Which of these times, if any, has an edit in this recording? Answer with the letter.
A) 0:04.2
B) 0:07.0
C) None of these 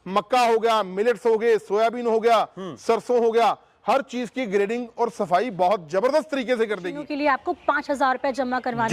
B